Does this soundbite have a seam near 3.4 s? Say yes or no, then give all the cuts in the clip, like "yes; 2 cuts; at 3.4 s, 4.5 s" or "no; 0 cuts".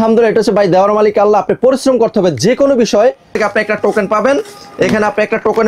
yes; 1 cut; at 3.4 s